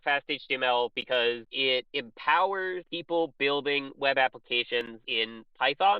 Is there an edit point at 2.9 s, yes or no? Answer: yes